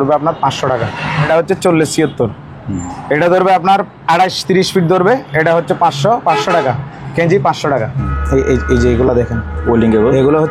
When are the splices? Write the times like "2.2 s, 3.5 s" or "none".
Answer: 1.3 s, 8.1 s

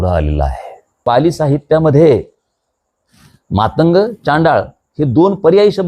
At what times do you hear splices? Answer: 1.0 s

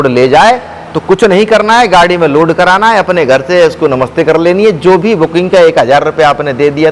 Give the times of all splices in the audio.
none

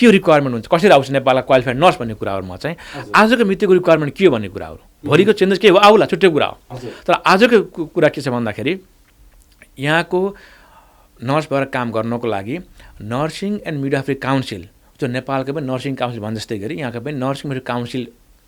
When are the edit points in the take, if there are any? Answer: none

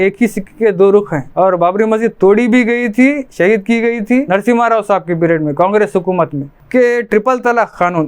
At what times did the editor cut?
1.3 s, 6.6 s

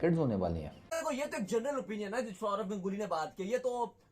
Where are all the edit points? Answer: 1.0 s

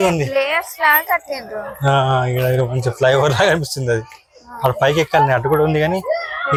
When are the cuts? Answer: none

